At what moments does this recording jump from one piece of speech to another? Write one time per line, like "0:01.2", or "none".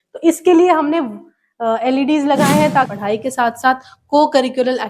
0:02.9